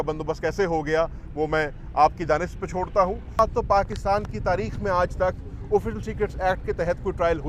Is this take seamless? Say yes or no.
no